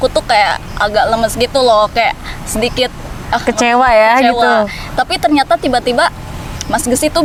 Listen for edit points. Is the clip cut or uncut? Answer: uncut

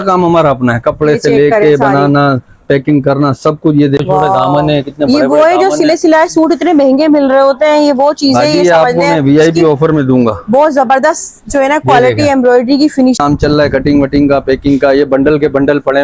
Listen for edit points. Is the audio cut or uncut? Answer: cut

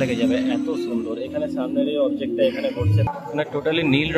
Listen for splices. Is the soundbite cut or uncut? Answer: cut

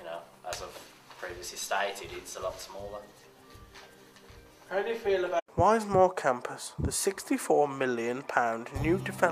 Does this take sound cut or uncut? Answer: uncut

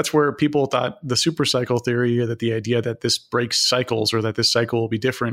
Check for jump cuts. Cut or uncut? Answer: uncut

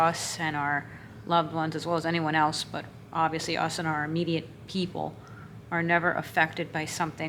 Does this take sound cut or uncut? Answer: uncut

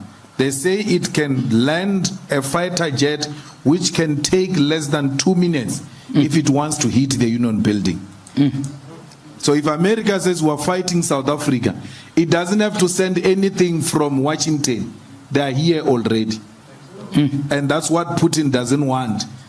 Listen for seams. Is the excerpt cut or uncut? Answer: uncut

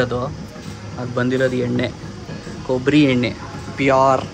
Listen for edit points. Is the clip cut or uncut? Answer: uncut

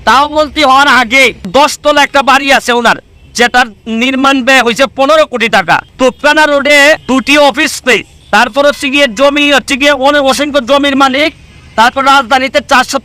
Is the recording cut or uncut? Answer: cut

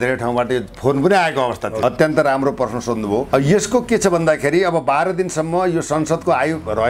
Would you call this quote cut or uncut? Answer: cut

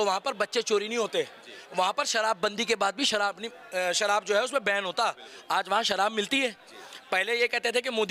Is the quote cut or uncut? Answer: uncut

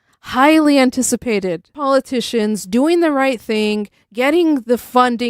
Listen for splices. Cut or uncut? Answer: cut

